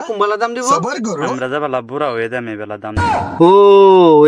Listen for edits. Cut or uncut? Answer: uncut